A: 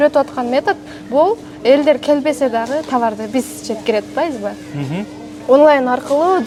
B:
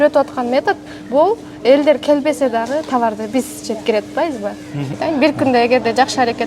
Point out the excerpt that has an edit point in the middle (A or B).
B